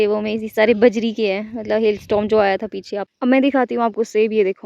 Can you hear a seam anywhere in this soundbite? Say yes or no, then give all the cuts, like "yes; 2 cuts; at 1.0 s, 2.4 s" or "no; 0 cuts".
yes; 1 cut; at 3.0 s